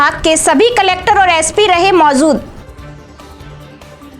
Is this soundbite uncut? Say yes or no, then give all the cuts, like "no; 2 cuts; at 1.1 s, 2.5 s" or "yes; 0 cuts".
no; 1 cut; at 2.6 s